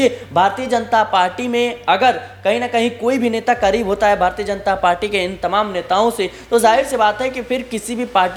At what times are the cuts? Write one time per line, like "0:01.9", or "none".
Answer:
none